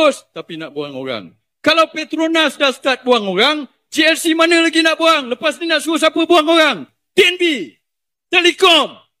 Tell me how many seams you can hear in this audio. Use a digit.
0